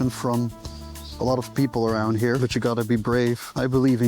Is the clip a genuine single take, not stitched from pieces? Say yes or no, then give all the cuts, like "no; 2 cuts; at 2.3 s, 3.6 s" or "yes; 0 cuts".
no; 1 cut; at 2.4 s